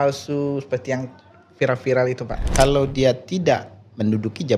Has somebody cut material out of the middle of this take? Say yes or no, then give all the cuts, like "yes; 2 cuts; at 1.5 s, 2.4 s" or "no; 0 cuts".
yes; 1 cut; at 2.4 s